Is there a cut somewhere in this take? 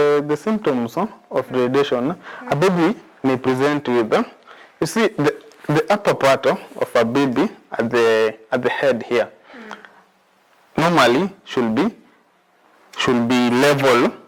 no; 0 cuts

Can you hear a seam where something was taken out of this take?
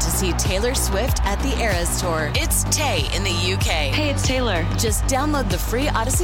no; 0 cuts

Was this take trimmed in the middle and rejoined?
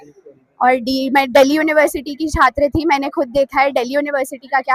no; 0 cuts

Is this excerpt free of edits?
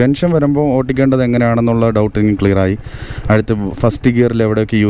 yes; 0 cuts

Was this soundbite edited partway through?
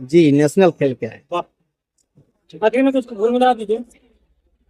no; 0 cuts

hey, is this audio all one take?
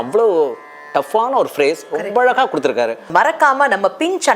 no; 1 cut; at 3.0 s

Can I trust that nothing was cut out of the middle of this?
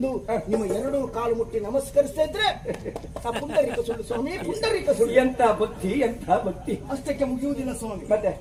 yes; 0 cuts

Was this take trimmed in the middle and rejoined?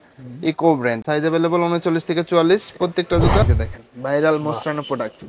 yes; 2 cuts; at 1.0 s, 3.5 s

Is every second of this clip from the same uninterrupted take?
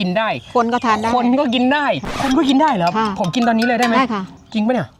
no; 1 cut; at 2.1 s

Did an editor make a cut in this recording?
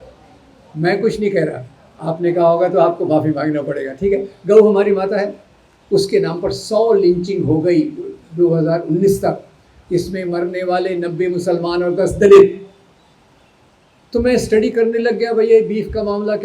no; 0 cuts

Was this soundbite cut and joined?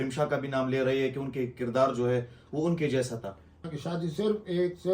yes; 1 cut; at 3.6 s

